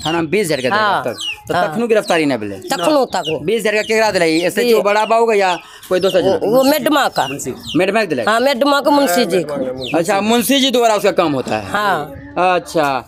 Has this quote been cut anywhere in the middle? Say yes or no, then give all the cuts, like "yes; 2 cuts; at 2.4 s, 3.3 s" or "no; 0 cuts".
no; 0 cuts